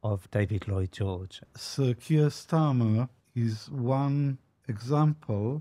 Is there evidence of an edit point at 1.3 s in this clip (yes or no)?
yes